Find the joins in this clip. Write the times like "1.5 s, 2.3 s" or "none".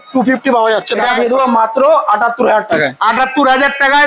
1.1 s